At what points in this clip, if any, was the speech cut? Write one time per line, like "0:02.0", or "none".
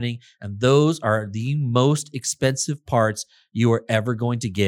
none